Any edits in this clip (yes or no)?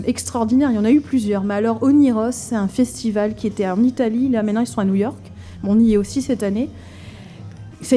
no